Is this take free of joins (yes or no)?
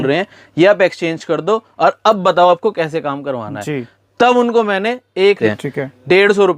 no